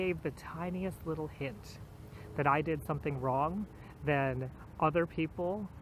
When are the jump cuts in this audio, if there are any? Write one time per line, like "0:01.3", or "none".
none